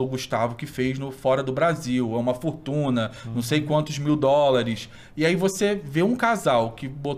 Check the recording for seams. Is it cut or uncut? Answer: uncut